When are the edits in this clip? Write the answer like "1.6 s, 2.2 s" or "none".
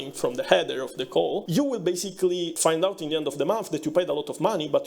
1.4 s, 2.5 s